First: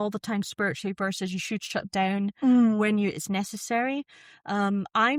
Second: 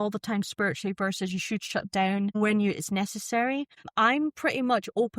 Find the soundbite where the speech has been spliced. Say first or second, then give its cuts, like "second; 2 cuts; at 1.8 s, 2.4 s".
second; 2 cuts; at 2.4 s, 3.9 s